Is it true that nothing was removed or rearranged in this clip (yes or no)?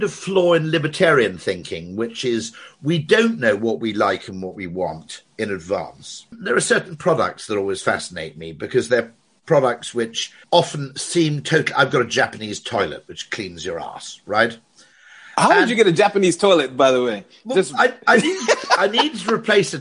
no